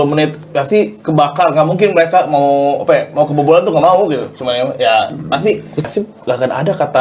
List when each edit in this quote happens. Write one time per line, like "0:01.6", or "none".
0:05.9